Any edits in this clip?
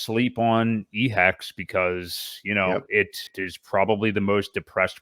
yes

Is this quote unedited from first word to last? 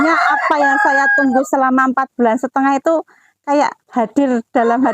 yes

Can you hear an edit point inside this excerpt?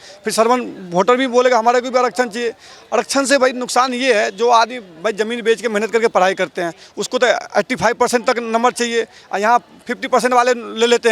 no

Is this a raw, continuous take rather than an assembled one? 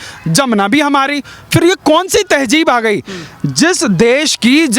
yes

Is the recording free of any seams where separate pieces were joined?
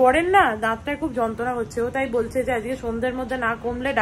yes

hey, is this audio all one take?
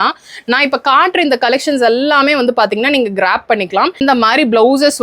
no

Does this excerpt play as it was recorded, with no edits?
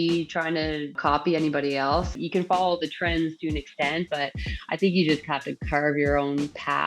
no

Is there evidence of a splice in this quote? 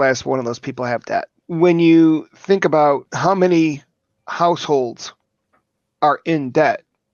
yes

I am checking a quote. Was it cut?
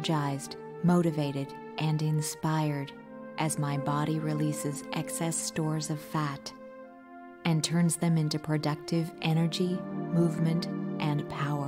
no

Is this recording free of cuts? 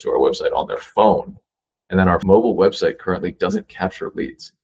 no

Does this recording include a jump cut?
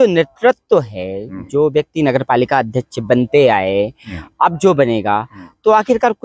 no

